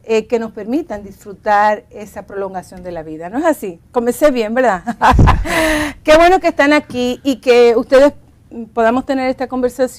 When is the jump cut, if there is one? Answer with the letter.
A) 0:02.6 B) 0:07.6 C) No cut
B